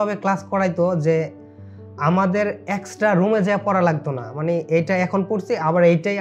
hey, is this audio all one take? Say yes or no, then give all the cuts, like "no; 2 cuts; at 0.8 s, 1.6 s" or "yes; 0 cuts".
yes; 0 cuts